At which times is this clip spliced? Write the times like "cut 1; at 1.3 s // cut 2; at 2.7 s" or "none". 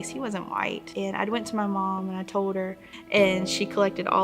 cut 1; at 0.8 s // cut 2; at 2.9 s